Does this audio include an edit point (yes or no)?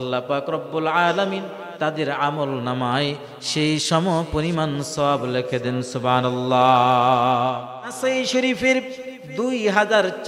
yes